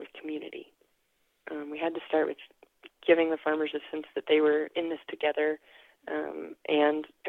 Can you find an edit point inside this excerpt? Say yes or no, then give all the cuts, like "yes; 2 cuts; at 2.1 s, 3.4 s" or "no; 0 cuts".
no; 0 cuts